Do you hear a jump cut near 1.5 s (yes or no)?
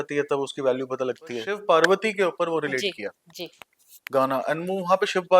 yes